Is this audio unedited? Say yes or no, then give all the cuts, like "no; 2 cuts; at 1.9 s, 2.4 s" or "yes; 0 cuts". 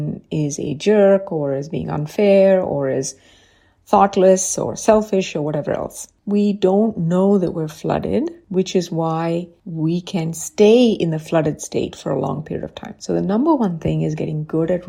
yes; 0 cuts